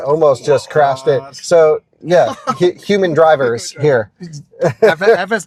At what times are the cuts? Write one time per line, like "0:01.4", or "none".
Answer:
none